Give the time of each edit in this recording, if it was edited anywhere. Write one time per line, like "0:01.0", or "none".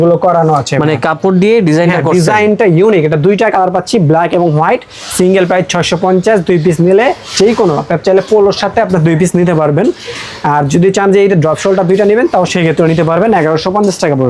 none